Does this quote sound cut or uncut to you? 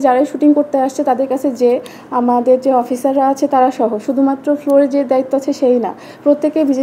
uncut